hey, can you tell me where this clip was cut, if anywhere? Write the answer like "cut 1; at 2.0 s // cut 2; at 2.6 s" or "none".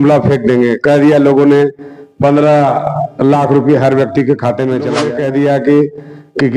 cut 1; at 5.0 s